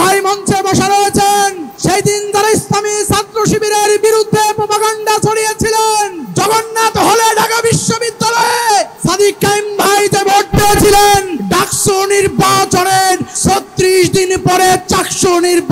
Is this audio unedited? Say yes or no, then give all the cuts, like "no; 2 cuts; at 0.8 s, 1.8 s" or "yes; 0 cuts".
no; 5 cuts; at 1.7 s, 6.2 s, 8.9 s, 11.4 s, 13.3 s